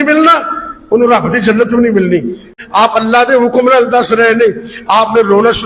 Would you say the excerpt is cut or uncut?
cut